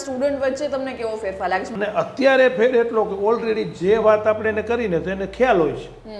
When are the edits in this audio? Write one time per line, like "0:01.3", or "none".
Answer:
0:01.7